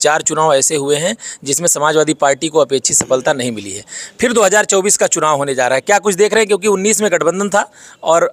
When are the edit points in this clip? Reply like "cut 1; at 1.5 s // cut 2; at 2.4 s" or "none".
none